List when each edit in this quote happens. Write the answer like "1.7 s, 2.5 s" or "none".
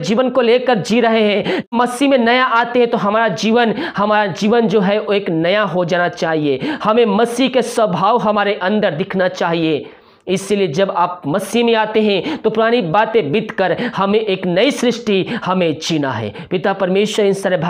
1.7 s